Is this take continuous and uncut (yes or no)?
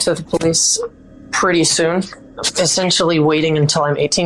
yes